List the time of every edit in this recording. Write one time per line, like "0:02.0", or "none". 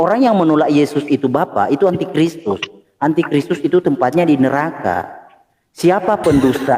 none